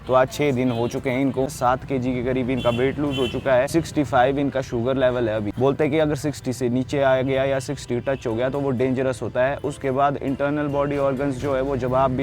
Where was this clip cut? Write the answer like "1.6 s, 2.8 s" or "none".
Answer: 1.5 s, 3.7 s, 5.5 s

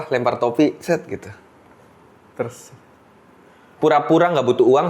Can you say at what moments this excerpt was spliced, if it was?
3.7 s

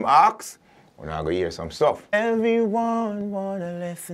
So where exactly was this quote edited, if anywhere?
2.0 s

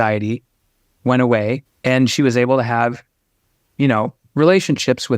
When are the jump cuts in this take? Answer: 1.6 s

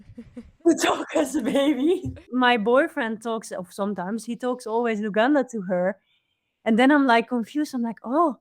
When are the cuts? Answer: 2.2 s

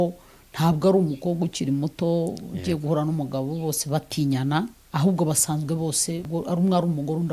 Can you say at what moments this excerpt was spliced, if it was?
4.8 s, 6.3 s

